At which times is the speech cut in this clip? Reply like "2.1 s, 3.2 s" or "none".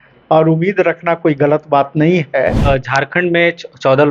2.6 s